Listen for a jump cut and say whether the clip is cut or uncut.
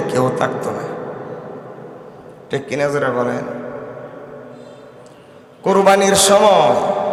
uncut